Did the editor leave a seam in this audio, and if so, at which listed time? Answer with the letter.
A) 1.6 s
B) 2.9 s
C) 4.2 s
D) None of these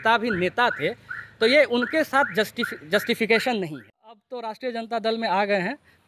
C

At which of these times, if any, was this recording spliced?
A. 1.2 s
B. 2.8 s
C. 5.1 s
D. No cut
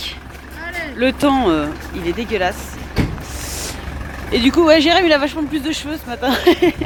D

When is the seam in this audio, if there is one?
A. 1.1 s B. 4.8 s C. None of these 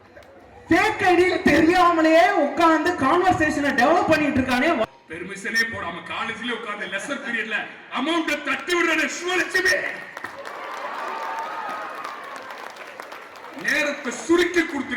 B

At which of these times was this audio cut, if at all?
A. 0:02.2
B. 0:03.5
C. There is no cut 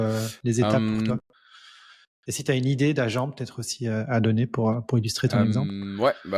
C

